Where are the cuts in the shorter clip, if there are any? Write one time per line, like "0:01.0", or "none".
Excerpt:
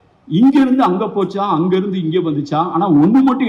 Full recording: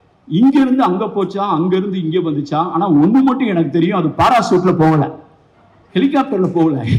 none